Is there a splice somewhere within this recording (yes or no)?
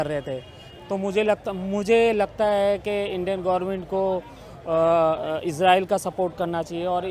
no